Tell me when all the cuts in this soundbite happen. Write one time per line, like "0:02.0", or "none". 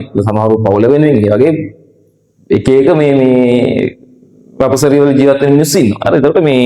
none